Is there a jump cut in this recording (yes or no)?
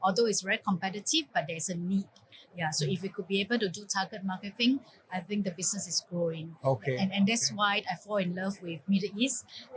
no